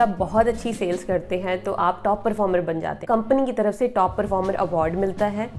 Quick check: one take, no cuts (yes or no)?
no